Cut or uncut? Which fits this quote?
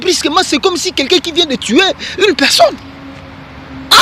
cut